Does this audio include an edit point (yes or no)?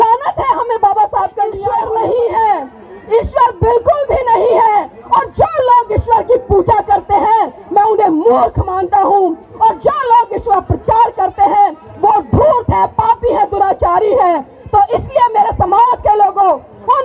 yes